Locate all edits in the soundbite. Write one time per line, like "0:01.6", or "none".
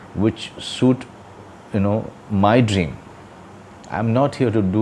none